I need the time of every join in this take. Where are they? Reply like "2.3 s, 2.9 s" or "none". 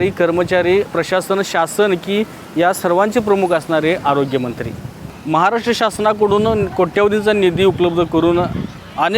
5.2 s